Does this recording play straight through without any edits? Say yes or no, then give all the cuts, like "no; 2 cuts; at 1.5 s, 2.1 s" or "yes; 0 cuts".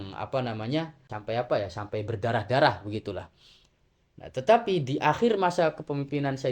no; 1 cut; at 1.1 s